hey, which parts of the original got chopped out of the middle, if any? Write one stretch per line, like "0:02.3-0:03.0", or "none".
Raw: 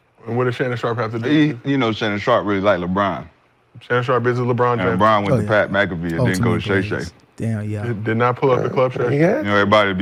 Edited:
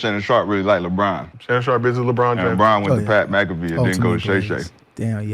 0:03.3-0:03.7